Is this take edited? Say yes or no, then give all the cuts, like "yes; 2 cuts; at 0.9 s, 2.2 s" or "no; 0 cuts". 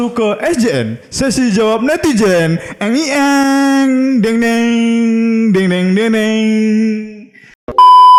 no; 0 cuts